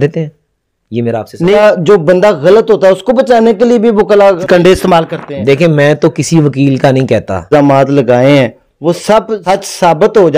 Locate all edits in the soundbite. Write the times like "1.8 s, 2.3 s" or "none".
1.5 s, 4.4 s, 7.5 s, 9.4 s